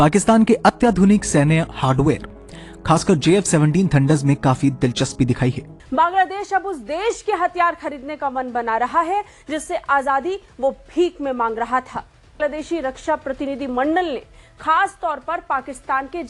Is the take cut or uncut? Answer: cut